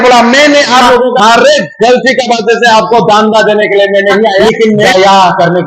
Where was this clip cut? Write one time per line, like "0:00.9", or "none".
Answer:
0:01.2
0:04.6